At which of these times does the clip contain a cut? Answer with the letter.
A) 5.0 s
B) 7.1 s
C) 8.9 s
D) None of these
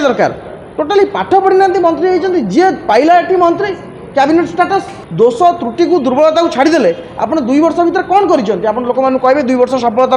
A